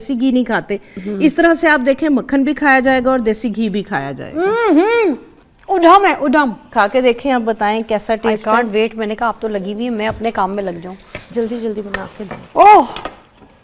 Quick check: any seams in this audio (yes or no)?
yes